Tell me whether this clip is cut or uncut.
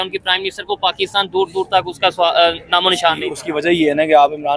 uncut